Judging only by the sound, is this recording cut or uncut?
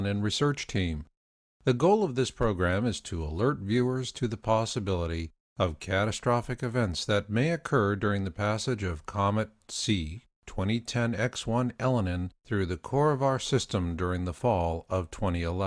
uncut